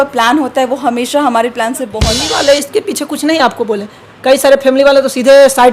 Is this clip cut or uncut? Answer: cut